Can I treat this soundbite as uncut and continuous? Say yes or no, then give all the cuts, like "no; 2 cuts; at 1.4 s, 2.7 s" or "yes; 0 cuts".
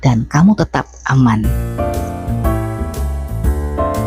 no; 1 cut; at 1.6 s